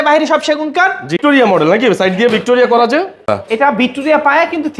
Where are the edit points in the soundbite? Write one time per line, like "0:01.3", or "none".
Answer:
0:01.2
0:03.3